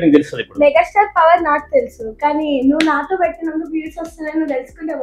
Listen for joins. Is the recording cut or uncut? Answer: uncut